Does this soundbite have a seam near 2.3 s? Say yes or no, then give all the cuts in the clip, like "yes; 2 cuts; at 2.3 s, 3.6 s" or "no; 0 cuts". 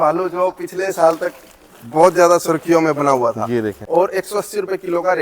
no; 1 cut; at 3.8 s